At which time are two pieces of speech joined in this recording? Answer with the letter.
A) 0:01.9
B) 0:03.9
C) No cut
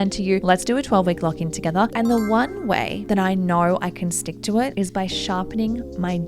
A